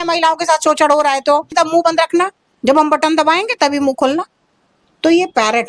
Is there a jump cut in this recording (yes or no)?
yes